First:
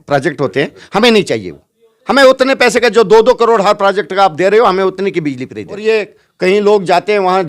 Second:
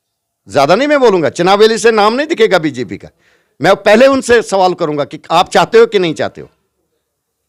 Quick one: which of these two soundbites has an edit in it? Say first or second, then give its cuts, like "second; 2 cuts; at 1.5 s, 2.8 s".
first; 1 cut; at 5.8 s